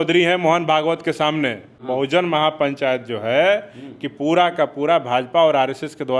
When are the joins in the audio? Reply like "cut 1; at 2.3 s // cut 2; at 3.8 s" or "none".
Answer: cut 1; at 1.7 s